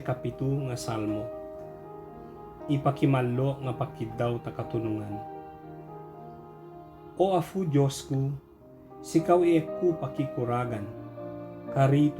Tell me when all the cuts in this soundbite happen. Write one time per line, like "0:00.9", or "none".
0:01.2
0:02.7